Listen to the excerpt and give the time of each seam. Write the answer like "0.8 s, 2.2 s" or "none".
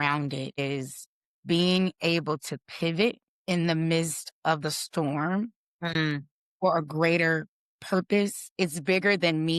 none